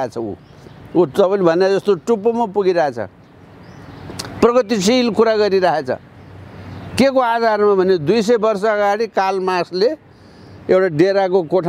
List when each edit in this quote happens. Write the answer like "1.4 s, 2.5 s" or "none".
none